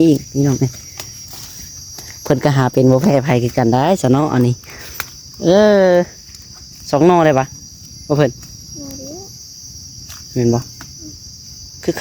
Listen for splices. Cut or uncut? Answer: uncut